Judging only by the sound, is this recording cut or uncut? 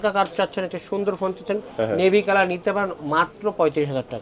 uncut